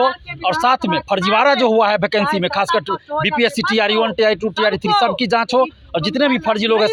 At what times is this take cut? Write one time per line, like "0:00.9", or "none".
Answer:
none